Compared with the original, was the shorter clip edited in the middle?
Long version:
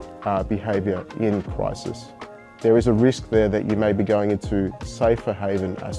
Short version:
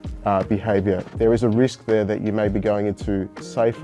yes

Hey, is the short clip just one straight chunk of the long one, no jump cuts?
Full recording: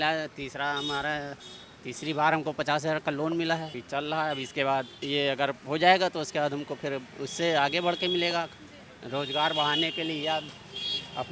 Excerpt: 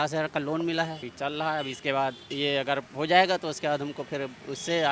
yes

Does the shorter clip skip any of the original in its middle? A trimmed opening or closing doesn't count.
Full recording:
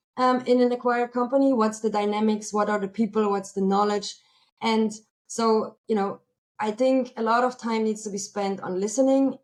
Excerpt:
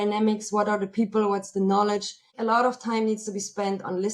yes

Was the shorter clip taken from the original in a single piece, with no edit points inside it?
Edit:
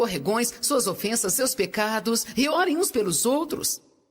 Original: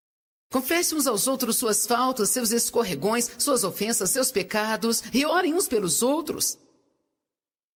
yes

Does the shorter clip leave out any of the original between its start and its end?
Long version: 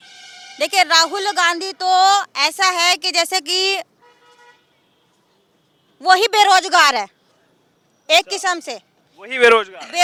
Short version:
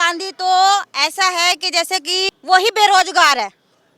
yes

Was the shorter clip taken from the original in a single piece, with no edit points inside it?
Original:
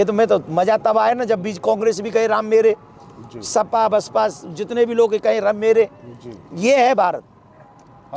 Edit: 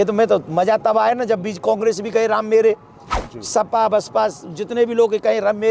yes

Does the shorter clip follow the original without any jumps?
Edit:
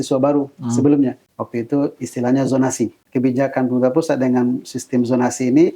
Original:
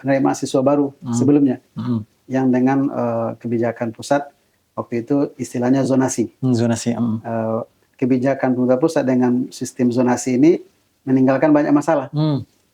no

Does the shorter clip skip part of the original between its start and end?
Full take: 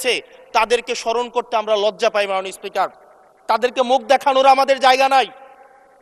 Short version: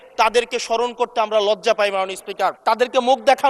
yes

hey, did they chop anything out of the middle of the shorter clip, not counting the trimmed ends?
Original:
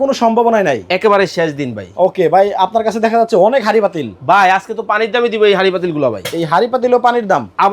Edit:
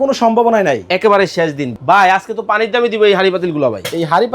yes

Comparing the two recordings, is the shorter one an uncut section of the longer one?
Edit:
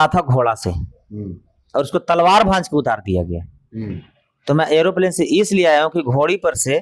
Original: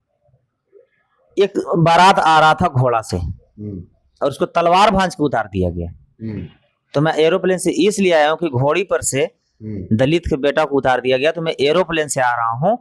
yes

